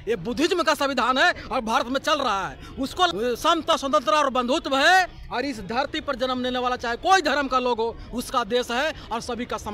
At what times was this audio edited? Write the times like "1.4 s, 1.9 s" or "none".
3.1 s

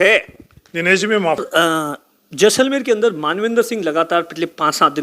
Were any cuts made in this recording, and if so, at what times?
1.4 s

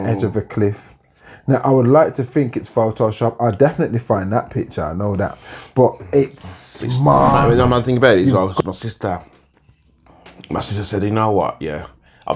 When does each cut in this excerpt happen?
7.4 s

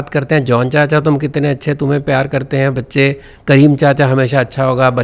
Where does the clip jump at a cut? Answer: none

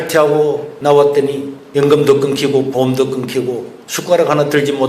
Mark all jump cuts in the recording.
3.7 s

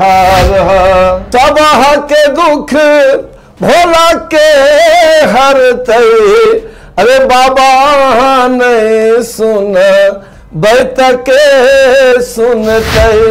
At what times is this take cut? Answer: 1.2 s

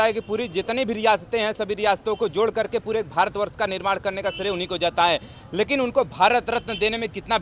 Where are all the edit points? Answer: none

